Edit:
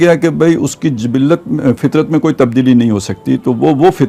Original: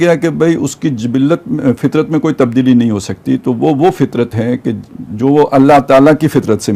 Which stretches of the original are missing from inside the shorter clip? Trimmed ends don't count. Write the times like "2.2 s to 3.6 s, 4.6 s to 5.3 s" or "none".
none